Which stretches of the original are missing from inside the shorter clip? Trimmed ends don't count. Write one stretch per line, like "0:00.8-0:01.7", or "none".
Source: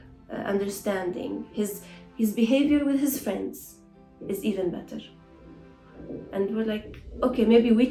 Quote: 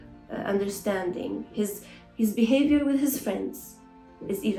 none